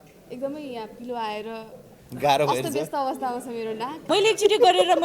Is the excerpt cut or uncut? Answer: cut